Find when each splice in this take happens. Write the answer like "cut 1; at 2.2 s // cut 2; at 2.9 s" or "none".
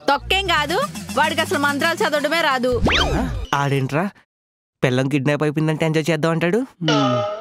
cut 1; at 3.4 s